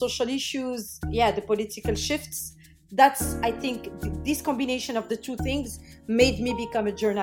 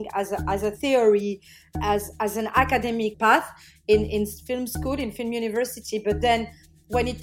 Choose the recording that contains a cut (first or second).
second